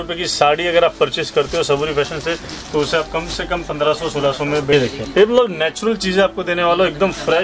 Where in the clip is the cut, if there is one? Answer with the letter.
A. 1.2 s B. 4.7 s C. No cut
B